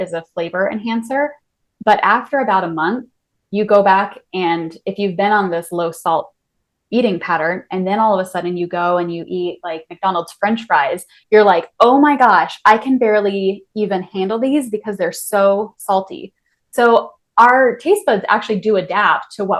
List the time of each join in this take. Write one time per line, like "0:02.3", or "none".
none